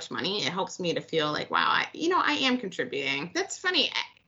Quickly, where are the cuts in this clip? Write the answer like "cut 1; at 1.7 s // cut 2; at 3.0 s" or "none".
cut 1; at 3.2 s